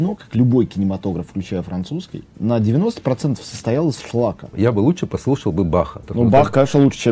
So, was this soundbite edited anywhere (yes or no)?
yes